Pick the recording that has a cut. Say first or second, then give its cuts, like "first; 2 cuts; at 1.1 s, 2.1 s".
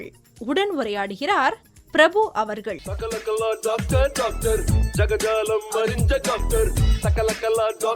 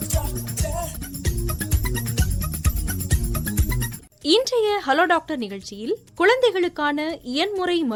first; 1 cut; at 2.8 s